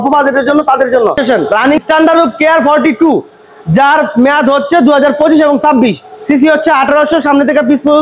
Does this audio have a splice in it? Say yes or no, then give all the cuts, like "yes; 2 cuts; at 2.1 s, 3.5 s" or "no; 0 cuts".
yes; 1 cut; at 1.8 s